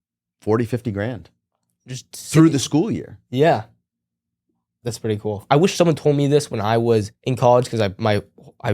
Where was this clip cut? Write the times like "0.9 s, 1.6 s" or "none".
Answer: 5.4 s, 7.2 s